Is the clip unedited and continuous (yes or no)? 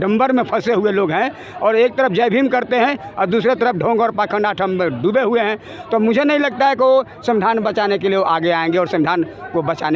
yes